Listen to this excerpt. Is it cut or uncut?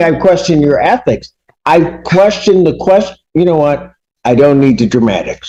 uncut